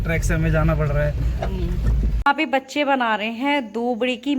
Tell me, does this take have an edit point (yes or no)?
yes